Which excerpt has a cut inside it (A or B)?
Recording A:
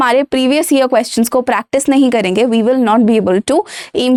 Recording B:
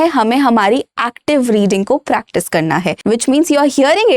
B